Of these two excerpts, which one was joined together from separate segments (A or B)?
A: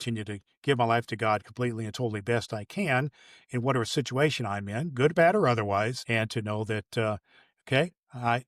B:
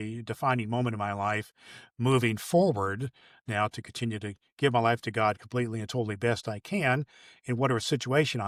A